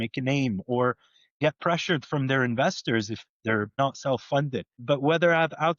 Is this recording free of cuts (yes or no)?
no